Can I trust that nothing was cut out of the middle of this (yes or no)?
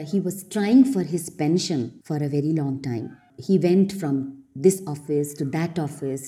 no